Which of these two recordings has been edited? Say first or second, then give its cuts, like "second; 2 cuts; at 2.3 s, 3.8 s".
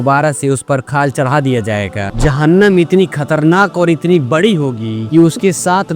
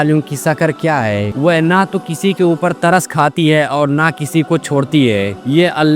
first; 1 cut; at 2.1 s